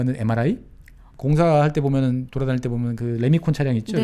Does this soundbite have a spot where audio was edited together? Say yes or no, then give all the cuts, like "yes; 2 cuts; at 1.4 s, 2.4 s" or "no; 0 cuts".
yes; 1 cut; at 1.1 s